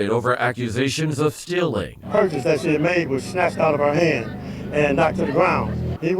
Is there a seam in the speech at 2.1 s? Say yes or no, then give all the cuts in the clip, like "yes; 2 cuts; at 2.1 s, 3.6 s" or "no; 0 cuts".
yes; 2 cuts; at 2.1 s, 5.0 s